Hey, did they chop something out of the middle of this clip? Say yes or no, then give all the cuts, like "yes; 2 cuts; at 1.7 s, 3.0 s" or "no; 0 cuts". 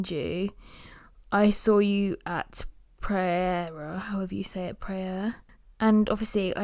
no; 0 cuts